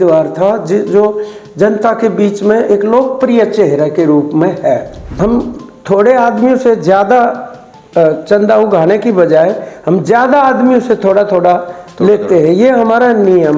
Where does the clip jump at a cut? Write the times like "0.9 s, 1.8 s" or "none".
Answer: 5.1 s